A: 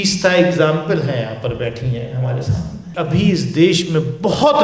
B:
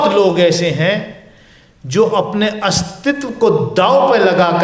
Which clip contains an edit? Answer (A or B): A